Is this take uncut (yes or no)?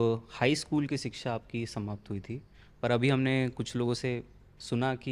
yes